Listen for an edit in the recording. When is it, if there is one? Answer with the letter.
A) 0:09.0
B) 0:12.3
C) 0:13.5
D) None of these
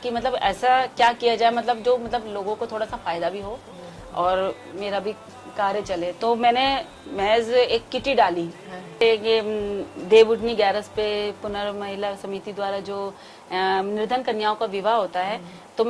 A